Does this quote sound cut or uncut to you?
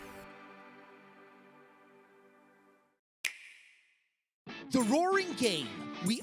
cut